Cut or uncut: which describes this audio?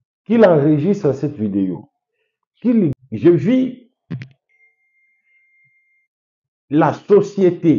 cut